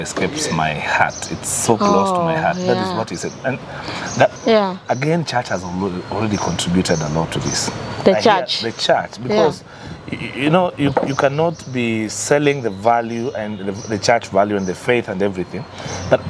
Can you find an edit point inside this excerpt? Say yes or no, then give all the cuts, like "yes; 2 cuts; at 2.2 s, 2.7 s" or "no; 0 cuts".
yes; 1 cut; at 4.3 s